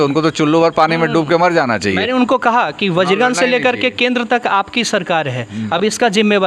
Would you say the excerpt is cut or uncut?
uncut